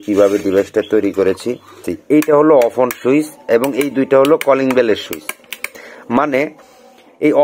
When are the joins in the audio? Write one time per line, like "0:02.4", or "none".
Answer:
0:01.9